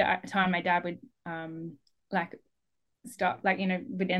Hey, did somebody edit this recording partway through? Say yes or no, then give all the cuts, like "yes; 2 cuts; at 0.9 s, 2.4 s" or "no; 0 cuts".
no; 0 cuts